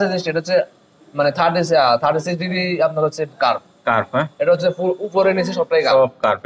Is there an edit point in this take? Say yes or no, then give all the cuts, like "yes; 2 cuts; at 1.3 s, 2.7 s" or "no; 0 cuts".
no; 0 cuts